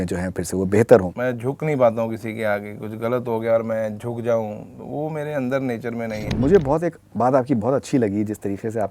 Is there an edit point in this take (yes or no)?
yes